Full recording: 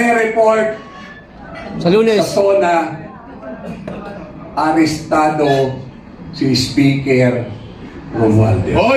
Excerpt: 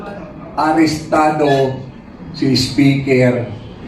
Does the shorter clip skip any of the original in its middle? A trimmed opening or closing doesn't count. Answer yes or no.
no